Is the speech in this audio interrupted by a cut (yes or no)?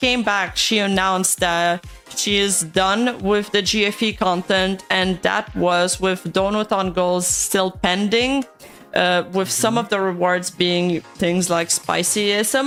no